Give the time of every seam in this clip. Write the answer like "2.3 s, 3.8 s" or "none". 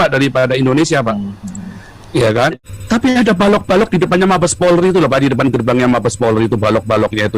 2.5 s